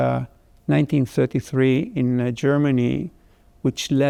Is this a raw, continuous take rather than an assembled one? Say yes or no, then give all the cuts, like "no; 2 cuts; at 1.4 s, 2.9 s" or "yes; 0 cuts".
yes; 0 cuts